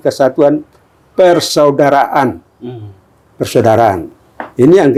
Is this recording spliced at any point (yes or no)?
no